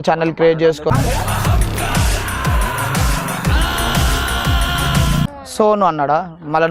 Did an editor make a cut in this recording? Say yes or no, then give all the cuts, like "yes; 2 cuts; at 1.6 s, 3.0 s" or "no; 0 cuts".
yes; 1 cut; at 5.2 s